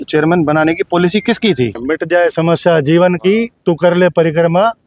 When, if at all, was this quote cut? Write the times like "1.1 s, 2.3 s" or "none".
1.8 s